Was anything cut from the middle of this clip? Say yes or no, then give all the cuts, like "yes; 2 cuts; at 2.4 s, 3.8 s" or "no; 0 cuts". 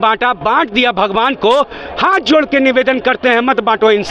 no; 0 cuts